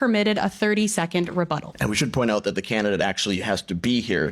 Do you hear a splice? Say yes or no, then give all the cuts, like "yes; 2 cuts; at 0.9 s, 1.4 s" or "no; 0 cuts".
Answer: yes; 1 cut; at 1.7 s